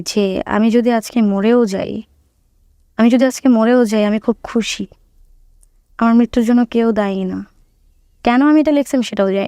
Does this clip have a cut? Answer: no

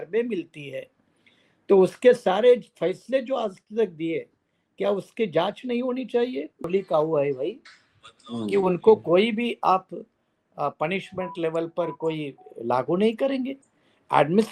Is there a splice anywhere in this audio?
yes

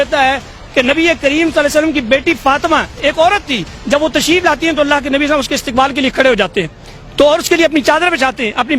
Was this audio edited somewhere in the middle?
no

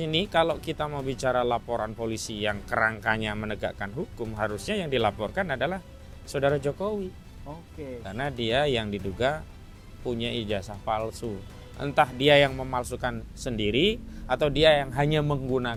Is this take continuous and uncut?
yes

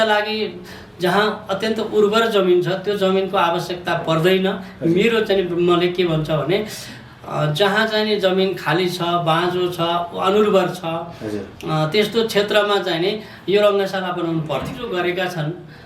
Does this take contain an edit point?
yes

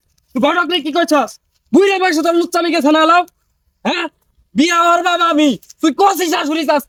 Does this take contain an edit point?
no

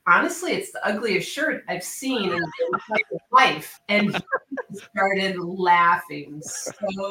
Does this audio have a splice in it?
no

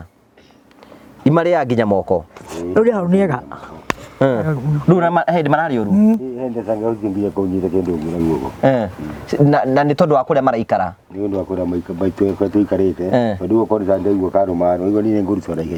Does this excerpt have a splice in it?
no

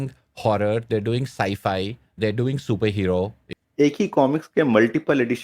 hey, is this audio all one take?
no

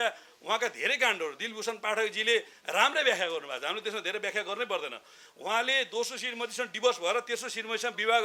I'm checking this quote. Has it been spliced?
no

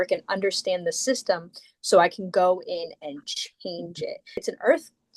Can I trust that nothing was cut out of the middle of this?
no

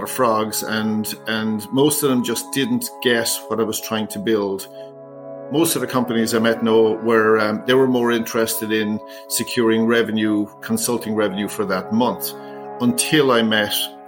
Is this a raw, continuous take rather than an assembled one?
no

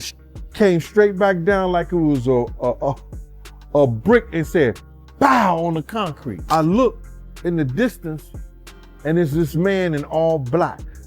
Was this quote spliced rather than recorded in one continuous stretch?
yes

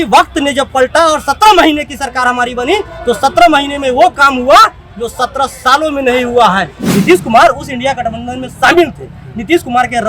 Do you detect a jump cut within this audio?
yes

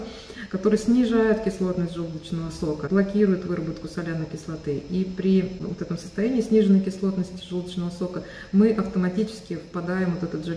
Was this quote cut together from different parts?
yes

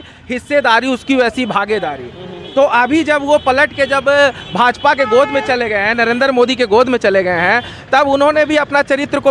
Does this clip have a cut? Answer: no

